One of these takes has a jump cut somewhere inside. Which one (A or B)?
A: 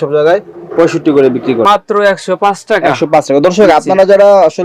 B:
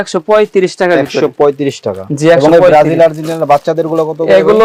A